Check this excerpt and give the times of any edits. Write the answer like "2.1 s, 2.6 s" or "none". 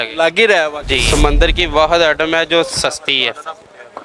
1.0 s